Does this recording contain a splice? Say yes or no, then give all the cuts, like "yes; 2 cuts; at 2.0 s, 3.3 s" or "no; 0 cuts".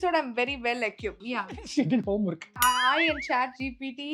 yes; 2 cuts; at 1.2 s, 2.6 s